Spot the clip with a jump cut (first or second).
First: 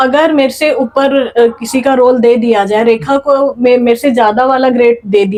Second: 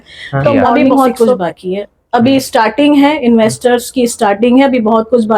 second